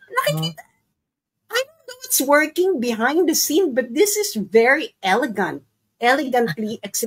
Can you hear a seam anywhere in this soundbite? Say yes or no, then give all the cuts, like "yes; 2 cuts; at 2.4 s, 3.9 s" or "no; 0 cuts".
no; 0 cuts